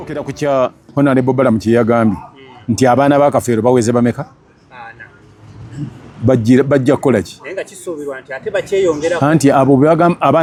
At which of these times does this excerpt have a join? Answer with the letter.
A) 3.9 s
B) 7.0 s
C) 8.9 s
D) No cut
D